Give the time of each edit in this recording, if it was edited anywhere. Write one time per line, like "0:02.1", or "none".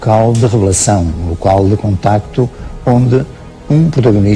none